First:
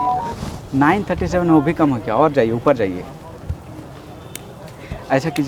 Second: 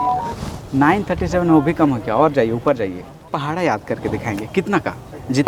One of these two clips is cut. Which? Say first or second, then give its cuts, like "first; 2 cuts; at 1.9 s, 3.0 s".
second; 1 cut; at 3.3 s